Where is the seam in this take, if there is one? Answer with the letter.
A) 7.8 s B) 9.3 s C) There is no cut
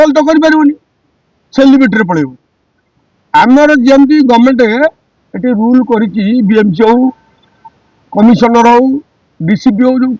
C